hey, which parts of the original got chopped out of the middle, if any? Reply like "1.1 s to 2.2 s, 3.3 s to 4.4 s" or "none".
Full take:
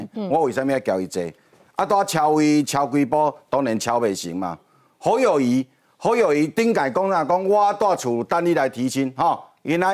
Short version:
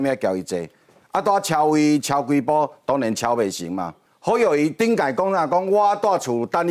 4.7 s to 5.8 s